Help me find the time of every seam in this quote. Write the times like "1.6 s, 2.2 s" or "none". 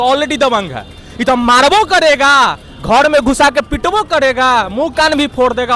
none